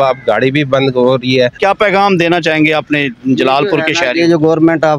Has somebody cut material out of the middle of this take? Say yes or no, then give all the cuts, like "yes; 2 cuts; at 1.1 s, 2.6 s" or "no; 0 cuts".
yes; 1 cut; at 1.6 s